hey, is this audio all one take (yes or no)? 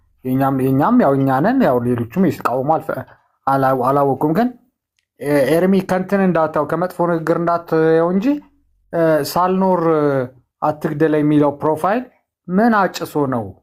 yes